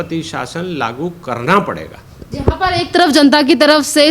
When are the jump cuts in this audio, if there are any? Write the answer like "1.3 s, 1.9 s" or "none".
none